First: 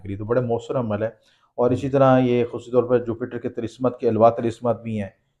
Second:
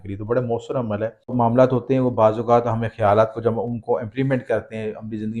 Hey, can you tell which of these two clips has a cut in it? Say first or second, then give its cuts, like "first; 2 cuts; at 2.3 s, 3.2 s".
second; 1 cut; at 1.3 s